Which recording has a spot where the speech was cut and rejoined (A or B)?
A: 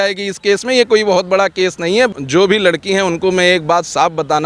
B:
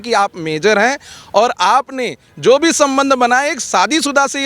A